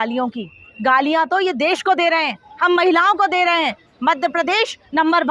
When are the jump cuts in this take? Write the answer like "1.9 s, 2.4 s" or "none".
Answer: none